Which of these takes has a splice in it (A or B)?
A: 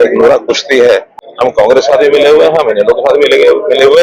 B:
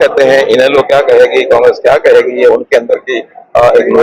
A